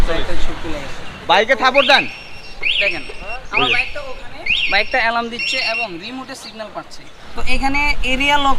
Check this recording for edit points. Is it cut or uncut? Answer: cut